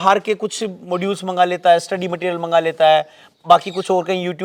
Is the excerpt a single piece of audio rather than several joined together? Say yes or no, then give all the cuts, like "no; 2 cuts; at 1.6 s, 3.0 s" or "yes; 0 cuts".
yes; 0 cuts